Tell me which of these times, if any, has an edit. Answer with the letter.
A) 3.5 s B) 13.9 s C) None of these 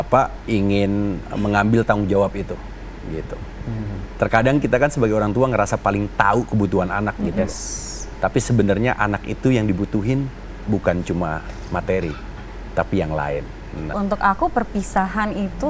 B